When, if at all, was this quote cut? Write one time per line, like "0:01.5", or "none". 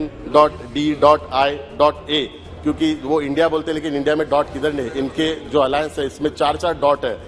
none